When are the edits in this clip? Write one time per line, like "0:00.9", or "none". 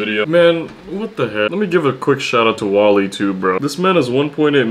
0:01.5